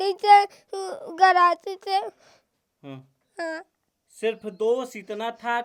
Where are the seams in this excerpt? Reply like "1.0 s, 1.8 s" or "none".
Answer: none